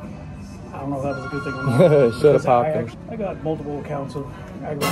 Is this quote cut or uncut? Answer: cut